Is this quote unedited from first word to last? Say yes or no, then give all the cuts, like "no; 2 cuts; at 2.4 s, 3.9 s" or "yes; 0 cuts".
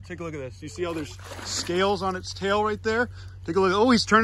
yes; 0 cuts